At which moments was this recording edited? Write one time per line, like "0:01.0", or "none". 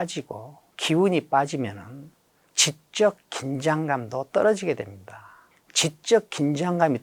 0:02.4